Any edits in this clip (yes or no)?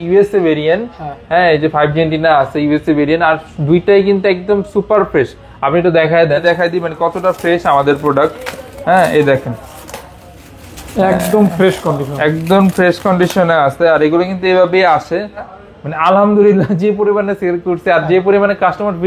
yes